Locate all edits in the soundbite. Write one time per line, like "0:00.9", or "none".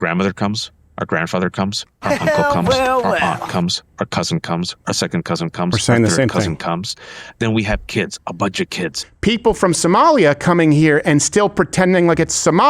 0:09.0